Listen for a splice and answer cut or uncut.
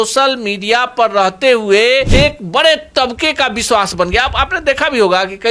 cut